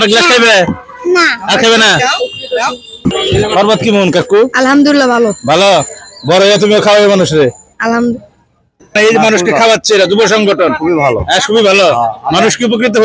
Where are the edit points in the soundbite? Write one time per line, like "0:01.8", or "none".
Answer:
none